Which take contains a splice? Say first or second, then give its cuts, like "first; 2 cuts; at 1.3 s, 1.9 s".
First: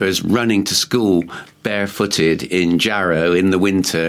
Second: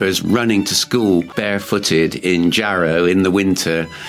second; 1 cut; at 1.3 s